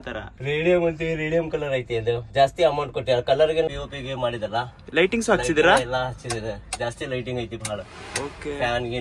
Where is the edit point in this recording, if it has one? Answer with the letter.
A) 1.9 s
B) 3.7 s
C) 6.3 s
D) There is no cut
B